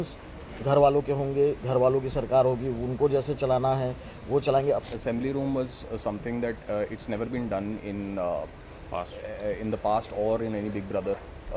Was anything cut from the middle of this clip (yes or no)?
yes